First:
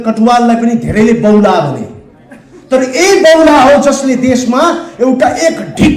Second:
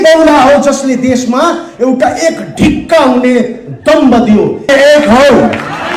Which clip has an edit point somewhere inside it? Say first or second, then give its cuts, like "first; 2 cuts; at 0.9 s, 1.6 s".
second; 1 cut; at 4.6 s